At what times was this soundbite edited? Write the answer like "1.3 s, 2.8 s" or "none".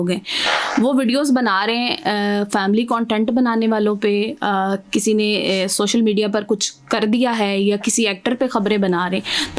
none